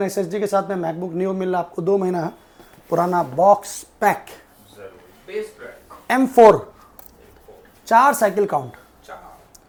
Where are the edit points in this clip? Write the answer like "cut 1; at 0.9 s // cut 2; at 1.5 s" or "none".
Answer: none